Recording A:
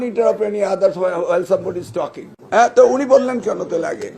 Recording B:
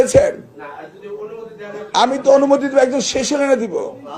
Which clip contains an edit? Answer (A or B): A